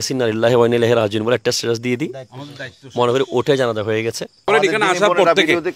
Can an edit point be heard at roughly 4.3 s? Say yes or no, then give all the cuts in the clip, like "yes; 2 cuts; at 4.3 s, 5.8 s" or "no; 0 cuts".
yes; 1 cut; at 4.3 s